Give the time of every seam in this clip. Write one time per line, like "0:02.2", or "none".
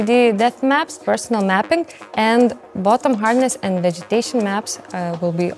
0:01.0